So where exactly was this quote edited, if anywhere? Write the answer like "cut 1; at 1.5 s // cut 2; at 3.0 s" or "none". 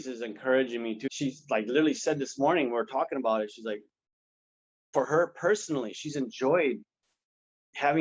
cut 1; at 1.0 s